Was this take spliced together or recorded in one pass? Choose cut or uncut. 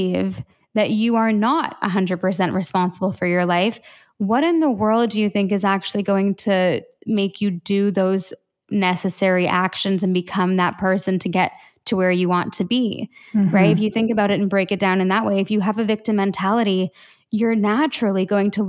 uncut